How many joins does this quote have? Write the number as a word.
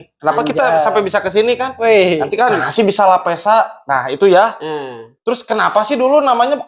one